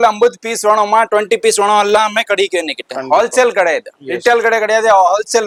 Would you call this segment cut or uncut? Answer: uncut